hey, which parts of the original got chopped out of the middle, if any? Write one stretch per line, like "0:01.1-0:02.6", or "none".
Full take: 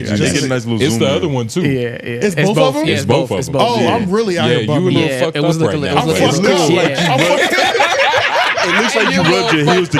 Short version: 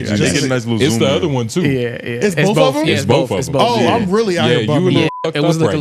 none